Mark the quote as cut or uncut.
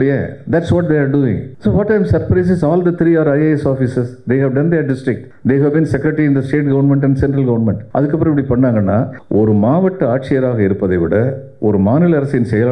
cut